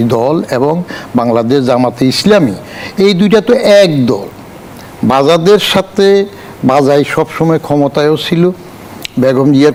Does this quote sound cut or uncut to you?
uncut